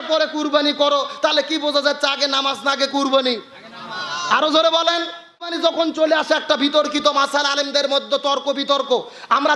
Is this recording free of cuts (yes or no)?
no